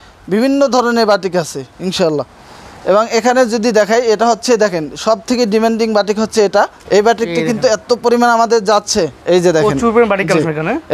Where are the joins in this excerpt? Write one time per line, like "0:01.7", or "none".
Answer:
none